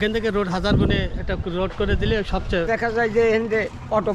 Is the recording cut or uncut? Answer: cut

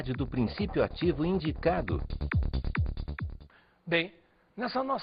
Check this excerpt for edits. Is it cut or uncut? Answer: uncut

